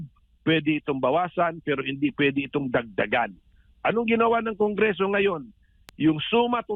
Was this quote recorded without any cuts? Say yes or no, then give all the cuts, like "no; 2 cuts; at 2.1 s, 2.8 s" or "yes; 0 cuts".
yes; 0 cuts